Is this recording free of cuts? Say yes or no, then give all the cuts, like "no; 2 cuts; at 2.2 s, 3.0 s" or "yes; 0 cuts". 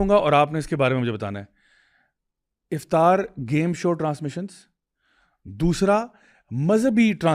yes; 0 cuts